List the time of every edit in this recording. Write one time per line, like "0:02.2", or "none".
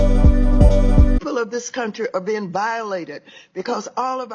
0:01.2